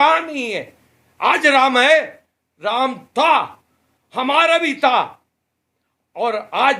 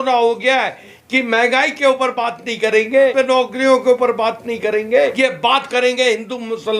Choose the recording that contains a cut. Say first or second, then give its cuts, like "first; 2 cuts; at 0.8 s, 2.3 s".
second; 3 cuts; at 0.9 s, 3.1 s, 5.1 s